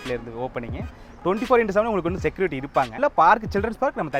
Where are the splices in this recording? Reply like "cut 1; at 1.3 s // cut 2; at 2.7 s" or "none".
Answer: cut 1; at 3.0 s